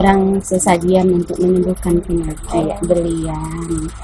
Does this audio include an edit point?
yes; 1 cut; at 2.6 s

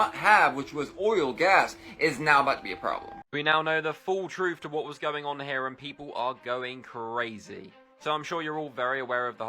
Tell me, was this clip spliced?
yes; 1 cut; at 3.2 s

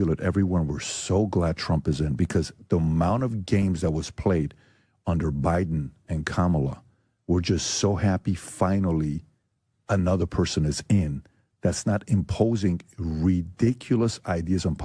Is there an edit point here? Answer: no; 0 cuts

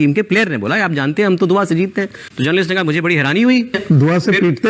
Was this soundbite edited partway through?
yes; 1 cut; at 3.8 s

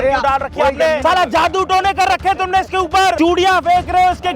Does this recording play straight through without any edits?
no; 2 cuts; at 1.0 s, 3.2 s

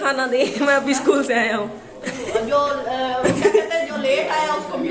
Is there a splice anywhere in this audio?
no; 0 cuts

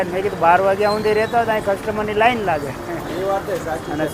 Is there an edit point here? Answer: no; 0 cuts

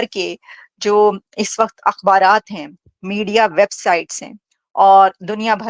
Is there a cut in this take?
no; 0 cuts

